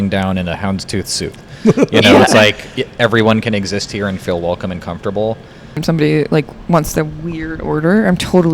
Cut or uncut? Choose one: cut